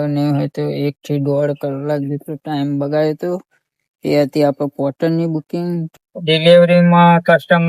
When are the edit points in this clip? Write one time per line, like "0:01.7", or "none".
0:06.0